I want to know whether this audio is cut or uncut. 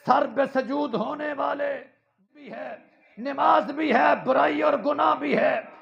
cut